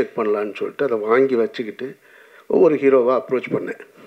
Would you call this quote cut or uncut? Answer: uncut